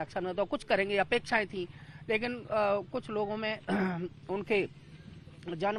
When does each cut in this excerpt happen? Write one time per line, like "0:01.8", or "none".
none